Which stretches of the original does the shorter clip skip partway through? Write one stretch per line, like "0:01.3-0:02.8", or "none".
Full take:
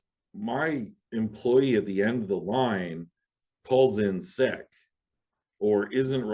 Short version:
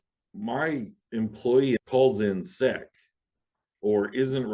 0:01.8-0:03.5

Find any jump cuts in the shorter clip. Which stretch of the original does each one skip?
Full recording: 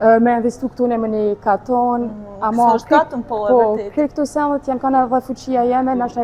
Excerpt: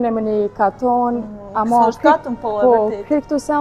none

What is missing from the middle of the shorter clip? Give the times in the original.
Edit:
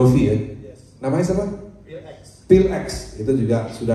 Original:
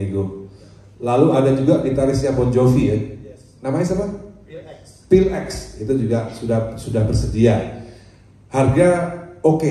none

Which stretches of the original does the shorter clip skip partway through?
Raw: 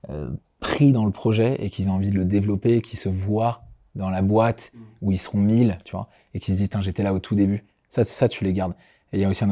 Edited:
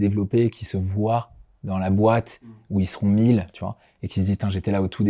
none

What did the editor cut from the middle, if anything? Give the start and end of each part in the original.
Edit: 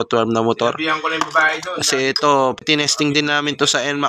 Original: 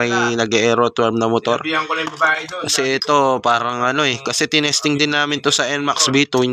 0:03.4-0:04.4

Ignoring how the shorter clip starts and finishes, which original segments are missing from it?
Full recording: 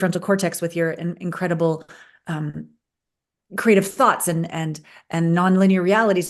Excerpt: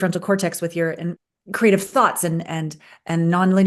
0:01.2-0:03.2

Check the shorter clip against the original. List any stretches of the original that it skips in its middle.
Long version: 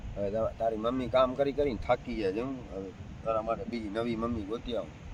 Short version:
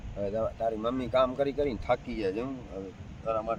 none

